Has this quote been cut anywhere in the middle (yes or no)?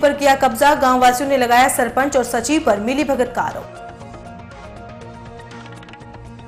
no